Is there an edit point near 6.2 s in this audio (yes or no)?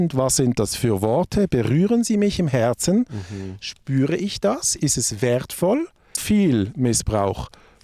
yes